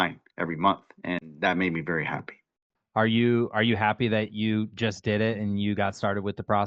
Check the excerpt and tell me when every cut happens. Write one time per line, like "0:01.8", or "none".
0:02.7

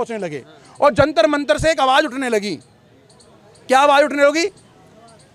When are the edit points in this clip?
none

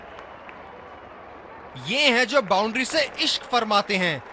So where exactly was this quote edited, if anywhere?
0:01.8

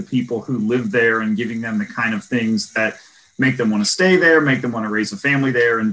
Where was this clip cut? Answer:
none

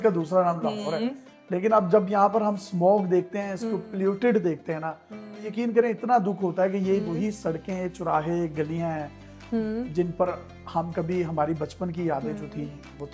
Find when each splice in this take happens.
none

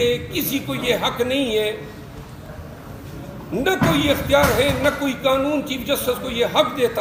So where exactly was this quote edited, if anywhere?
none

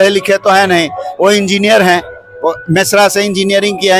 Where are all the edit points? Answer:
none

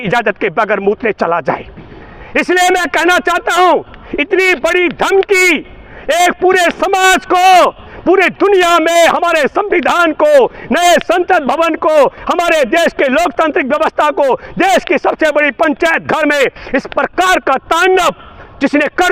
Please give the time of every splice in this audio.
none

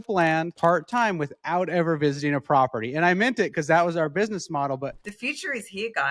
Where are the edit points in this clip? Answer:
0:04.9

